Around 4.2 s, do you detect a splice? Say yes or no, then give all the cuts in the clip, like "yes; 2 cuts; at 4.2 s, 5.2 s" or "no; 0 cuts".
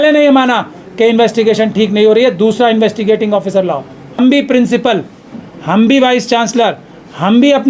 yes; 1 cut; at 4.2 s